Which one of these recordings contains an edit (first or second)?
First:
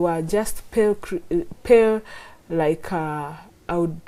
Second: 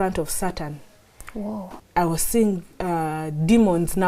second